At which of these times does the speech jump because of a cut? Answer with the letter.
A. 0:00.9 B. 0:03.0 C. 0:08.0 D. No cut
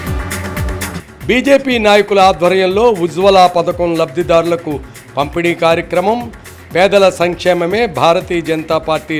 A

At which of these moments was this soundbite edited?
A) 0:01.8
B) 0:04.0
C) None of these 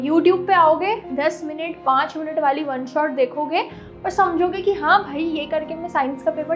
C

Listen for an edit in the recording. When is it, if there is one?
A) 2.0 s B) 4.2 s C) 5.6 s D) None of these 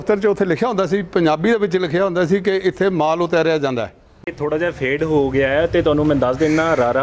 B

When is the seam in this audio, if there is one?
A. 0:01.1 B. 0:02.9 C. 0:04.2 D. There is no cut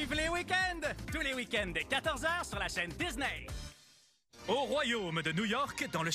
C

